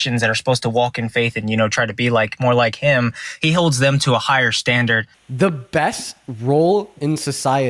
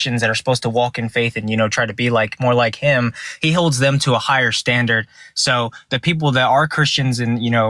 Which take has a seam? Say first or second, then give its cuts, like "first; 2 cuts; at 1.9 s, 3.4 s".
first; 1 cut; at 5.2 s